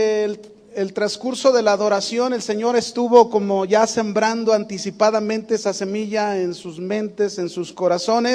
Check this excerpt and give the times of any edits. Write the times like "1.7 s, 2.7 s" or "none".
5.5 s